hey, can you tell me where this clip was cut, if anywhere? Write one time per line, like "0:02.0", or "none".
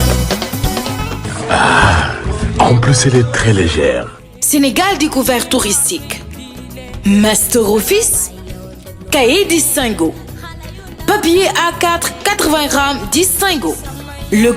0:04.5